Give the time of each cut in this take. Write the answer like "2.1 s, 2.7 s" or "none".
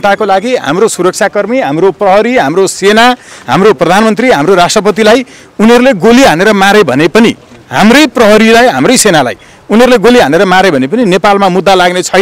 none